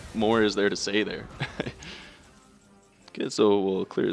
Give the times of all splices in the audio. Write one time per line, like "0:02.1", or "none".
none